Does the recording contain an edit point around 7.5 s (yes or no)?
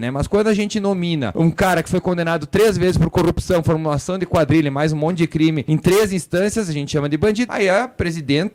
yes